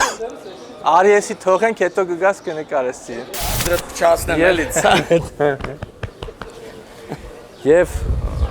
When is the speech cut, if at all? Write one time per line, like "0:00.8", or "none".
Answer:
0:03.6